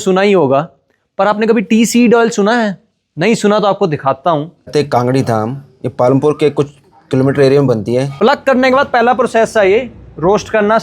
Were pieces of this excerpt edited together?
yes; 2 cuts; at 4.7 s, 8.1 s

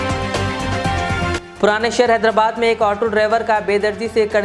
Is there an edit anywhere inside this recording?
yes; 1 cut; at 1.3 s

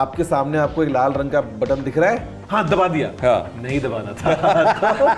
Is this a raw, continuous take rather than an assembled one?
yes; 0 cuts

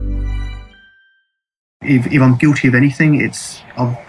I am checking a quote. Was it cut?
yes; 1 cut; at 1.7 s

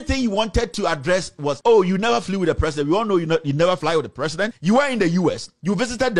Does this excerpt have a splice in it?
yes; 2 cuts; at 1.6 s, 4.0 s

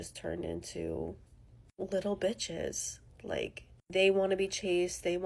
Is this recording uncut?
no; 1 cut; at 3.7 s

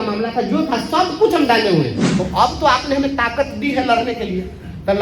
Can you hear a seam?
yes; 1 cut; at 2.1 s

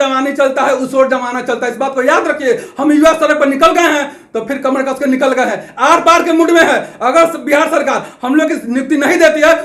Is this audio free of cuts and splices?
yes; 0 cuts

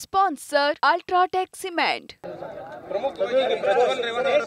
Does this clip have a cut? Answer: yes; 1 cut; at 2.1 s

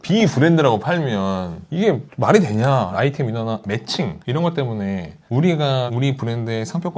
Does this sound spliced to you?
yes; 3 cuts; at 2.9 s, 4.2 s, 5.1 s

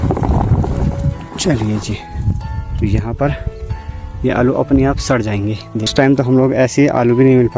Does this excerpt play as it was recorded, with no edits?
no; 1 cut; at 5.9 s

